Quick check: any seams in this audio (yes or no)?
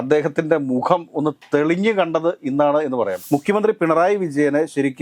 yes